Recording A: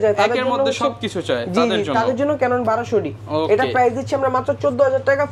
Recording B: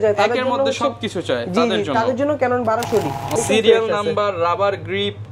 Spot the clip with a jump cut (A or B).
B